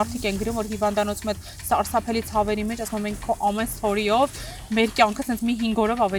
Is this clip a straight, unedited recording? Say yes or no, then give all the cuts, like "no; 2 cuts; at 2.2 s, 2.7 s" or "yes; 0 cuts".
yes; 0 cuts